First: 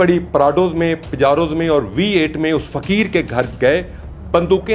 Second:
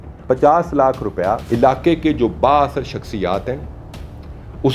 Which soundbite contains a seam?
second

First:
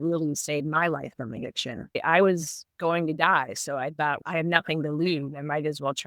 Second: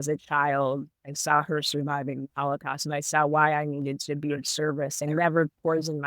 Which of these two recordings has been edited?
second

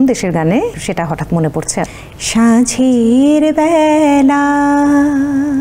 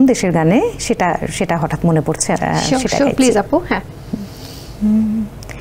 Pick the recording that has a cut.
first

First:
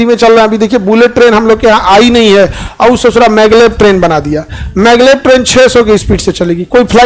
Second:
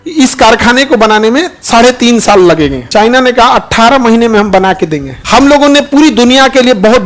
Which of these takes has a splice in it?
second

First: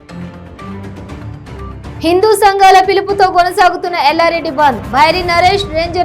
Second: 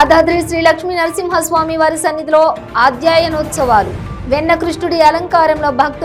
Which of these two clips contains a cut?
first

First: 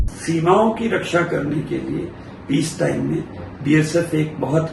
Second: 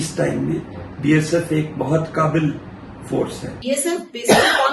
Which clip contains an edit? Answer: second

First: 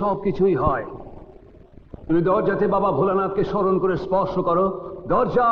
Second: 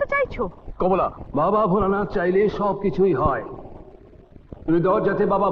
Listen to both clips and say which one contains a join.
second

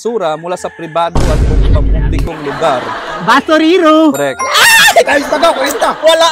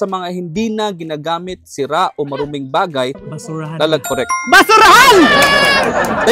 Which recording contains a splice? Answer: second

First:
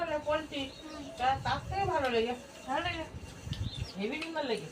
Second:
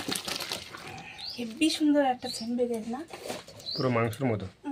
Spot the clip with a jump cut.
first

